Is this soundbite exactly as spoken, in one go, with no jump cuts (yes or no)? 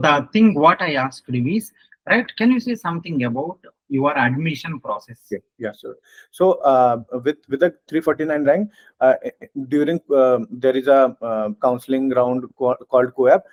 yes